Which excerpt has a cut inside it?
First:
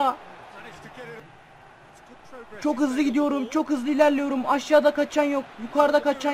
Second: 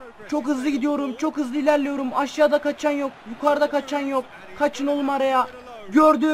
first; 1 cut; at 1.2 s

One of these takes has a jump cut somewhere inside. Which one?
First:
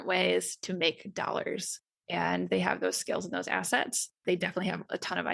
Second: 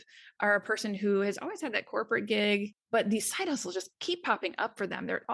second; 1 cut; at 2.8 s

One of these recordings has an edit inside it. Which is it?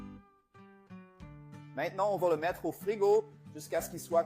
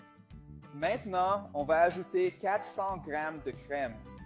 first; 1 cut; at 1.1 s

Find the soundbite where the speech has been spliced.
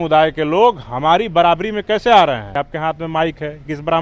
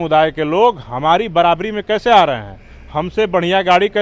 first; 1 cut; at 2.5 s

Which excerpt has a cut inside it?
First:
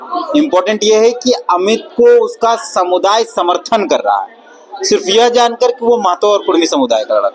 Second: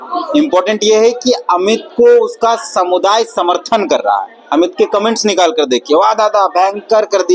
second; 1 cut; at 4.4 s

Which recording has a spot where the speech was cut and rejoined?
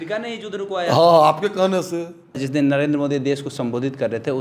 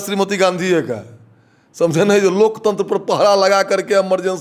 first; 1 cut; at 2.4 s

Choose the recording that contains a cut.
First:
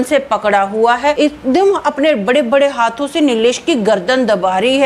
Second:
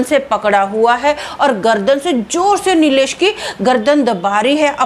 first; 1 cut; at 1.2 s

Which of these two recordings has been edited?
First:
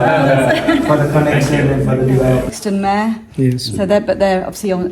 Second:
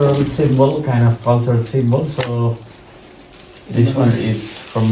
first; 1 cut; at 2.5 s

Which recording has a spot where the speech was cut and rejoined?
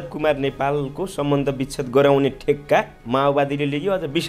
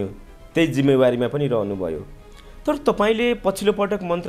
first; 1 cut; at 3.0 s

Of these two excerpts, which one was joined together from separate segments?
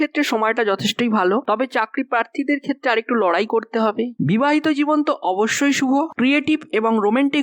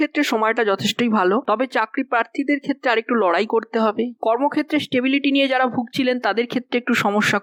first; 1 cut; at 4.1 s

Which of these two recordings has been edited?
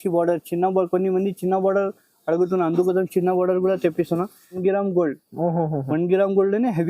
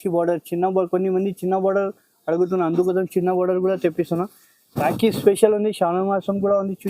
first; 1 cut; at 4.6 s

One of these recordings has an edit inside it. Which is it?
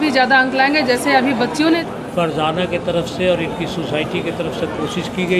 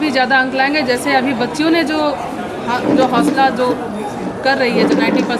first; 1 cut; at 1.8 s

